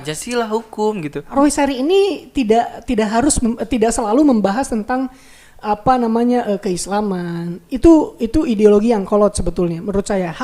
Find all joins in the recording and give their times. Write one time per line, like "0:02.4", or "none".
0:01.2

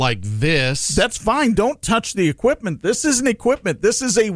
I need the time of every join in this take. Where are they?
none

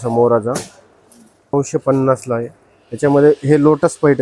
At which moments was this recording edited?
0:01.5

